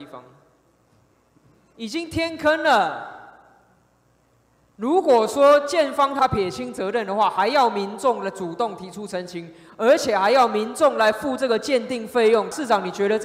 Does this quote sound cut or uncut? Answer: cut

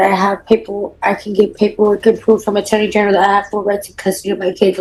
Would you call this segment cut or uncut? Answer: uncut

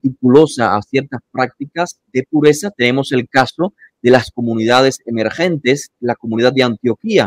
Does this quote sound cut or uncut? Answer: cut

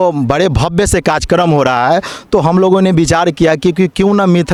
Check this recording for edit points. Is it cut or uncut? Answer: uncut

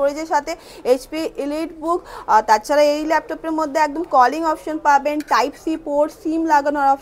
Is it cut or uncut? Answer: uncut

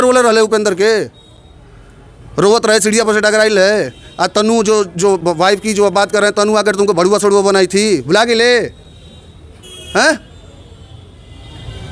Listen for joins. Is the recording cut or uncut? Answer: uncut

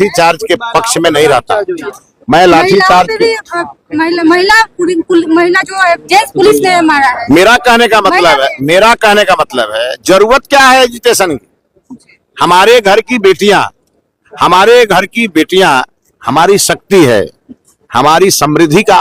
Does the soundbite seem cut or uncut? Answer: uncut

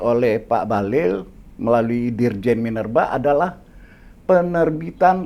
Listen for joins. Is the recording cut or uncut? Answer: uncut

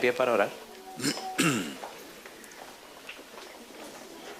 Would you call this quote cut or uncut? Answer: cut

